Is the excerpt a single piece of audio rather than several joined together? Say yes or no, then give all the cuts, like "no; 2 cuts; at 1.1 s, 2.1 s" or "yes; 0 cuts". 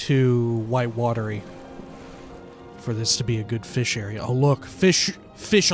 yes; 0 cuts